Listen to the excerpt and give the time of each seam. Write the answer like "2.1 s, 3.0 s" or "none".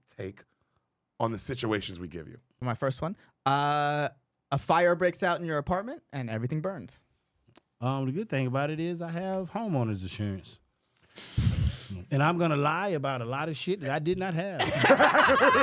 2.6 s